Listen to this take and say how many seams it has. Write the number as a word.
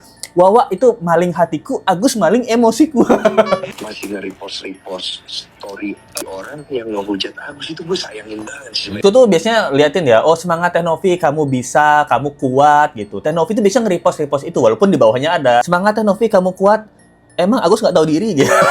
three